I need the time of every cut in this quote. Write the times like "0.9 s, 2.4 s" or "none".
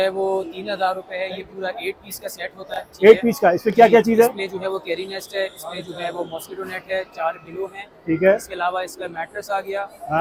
none